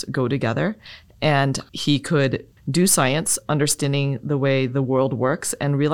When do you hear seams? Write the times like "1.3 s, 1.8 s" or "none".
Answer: 1.7 s, 2.6 s